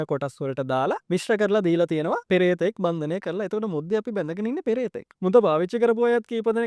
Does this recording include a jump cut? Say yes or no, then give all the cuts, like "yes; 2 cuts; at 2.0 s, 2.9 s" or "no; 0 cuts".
yes; 3 cuts; at 1.0 s, 2.2 s, 5.0 s